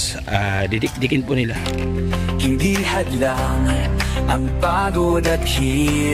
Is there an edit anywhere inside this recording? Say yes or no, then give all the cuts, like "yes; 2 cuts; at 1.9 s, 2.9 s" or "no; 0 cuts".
yes; 1 cut; at 1.6 s